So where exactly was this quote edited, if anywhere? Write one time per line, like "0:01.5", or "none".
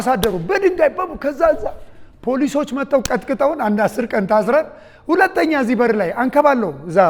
none